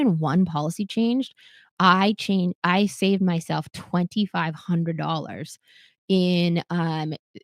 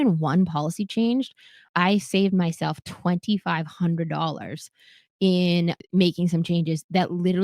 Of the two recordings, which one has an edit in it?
second; 2 cuts; at 1.7 s, 5.8 s

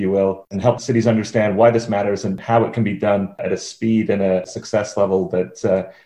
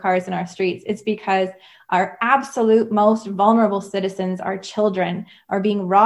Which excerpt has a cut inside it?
first; 4 cuts; at 0.8 s, 2.4 s, 3.4 s, 4.5 s

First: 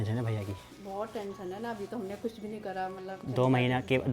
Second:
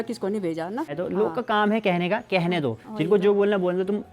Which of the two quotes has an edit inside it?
second; 1 cut; at 1.0 s

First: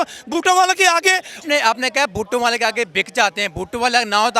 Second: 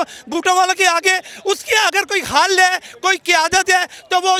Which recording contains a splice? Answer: first; 1 cut; at 1.4 s

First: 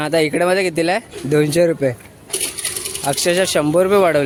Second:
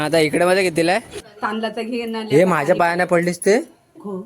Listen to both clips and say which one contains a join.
second; 1 cut; at 1.2 s

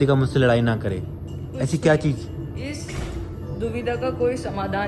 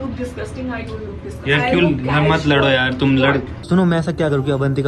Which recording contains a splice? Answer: second; 1 cut; at 3.5 s

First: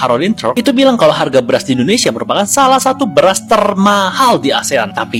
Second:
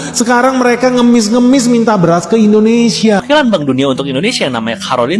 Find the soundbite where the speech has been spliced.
second; 1 cut; at 3.2 s

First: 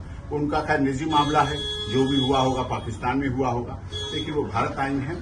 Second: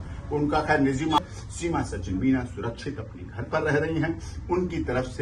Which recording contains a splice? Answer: second; 1 cut; at 1.2 s

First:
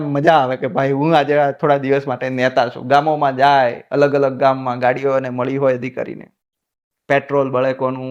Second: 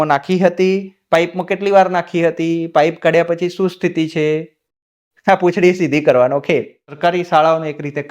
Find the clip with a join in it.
second; 1 cut; at 7.0 s

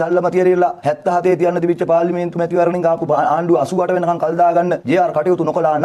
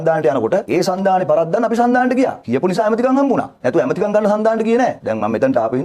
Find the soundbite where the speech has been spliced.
second; 1 cut; at 2.4 s

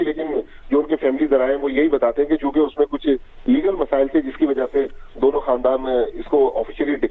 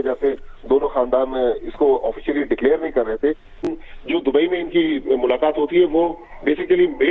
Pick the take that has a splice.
second; 1 cut; at 3.6 s

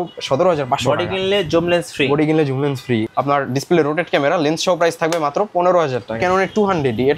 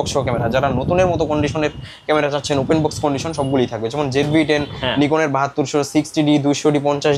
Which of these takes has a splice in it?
first; 2 cuts; at 3.0 s, 6.2 s

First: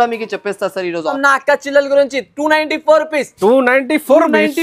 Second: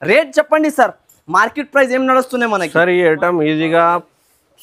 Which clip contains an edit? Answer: first; 1 cut; at 1.1 s

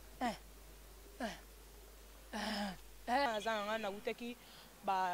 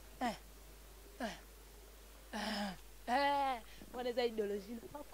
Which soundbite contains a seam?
first; 1 cut; at 3.3 s

